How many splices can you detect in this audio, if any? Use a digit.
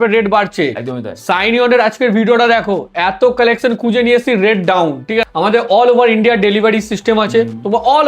1